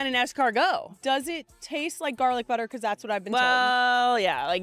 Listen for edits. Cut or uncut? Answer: cut